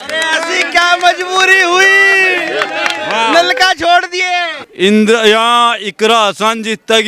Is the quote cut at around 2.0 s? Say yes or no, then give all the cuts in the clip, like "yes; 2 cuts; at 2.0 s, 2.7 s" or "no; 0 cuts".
no; 1 cut; at 4.6 s